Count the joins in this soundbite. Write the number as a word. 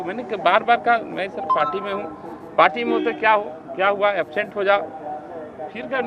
zero